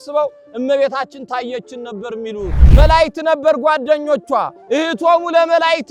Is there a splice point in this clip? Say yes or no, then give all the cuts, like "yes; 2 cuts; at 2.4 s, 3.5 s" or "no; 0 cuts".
yes; 1 cut; at 2.6 s